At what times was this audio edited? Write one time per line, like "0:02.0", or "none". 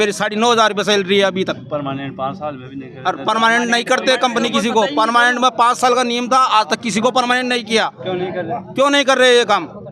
none